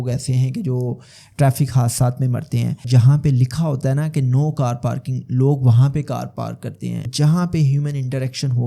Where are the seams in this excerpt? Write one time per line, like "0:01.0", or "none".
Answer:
0:02.8
0:07.1